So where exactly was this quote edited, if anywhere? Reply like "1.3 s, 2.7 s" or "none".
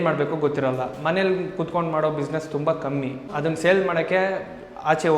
3.3 s